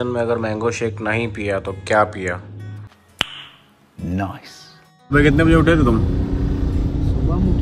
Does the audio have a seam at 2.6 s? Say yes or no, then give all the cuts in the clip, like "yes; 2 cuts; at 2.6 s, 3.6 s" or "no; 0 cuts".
no; 1 cut; at 5.1 s